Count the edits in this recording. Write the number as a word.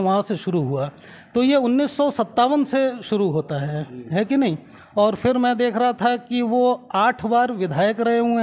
zero